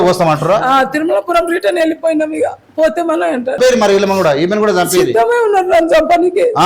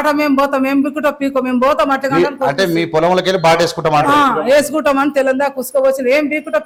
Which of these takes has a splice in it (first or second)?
first